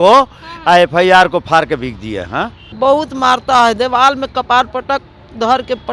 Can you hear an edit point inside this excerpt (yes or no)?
yes